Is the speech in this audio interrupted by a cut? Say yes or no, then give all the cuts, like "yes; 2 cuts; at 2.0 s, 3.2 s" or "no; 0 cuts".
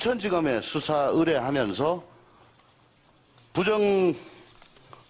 no; 0 cuts